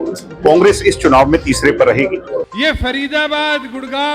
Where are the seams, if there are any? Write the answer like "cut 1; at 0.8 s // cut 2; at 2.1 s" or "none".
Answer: cut 1; at 2.4 s